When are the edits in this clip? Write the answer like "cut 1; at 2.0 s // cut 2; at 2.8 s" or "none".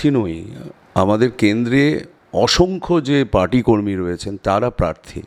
none